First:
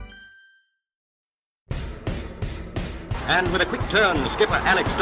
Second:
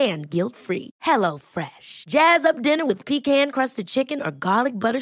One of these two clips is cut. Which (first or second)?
first